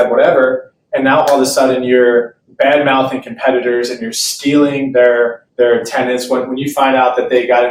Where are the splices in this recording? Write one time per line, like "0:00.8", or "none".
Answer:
none